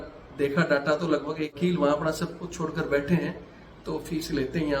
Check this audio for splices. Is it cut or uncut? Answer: cut